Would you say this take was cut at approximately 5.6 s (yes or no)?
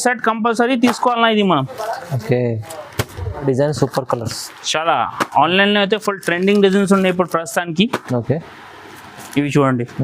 no